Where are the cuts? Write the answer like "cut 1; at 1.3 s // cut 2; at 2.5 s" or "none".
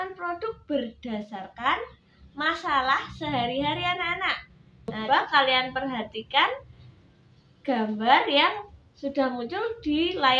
cut 1; at 5.0 s

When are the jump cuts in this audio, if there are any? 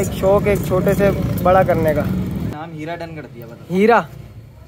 cut 1; at 2.5 s

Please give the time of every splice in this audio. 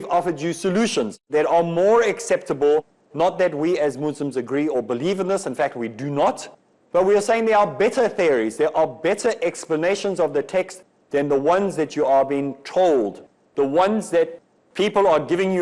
cut 1; at 1.2 s

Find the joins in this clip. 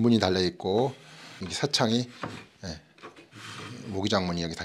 cut 1; at 1.4 s

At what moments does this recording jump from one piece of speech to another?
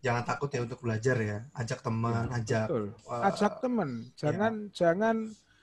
none

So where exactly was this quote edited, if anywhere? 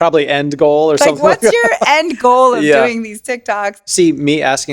cut 1; at 3.8 s

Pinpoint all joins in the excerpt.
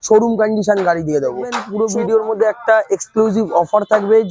cut 1; at 1.6 s

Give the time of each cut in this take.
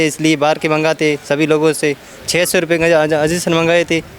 none

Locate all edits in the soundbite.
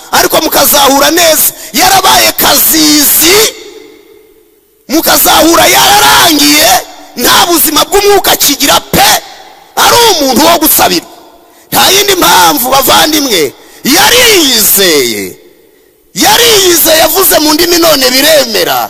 none

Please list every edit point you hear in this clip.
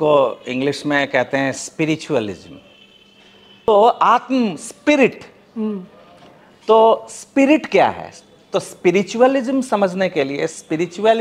cut 1; at 3.7 s

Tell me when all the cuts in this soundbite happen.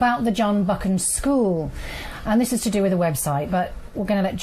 cut 1; at 2.8 s

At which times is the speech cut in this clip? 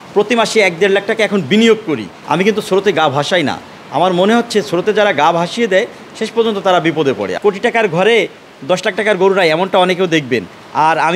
cut 1; at 2.1 s // cut 2; at 7.3 s

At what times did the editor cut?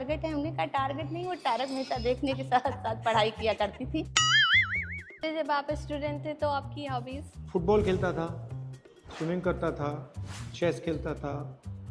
cut 1; at 3.8 s

